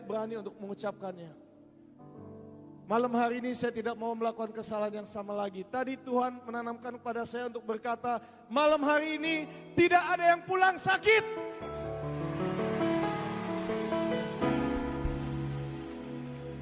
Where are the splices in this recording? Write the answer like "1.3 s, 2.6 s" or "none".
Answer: 8.1 s